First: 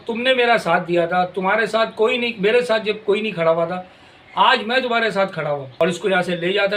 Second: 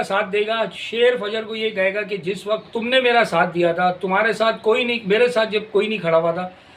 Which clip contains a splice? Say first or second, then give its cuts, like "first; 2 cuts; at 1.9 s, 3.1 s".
first; 1 cut; at 5.7 s